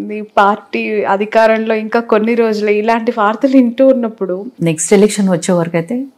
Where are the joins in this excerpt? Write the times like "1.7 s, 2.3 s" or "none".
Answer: 4.5 s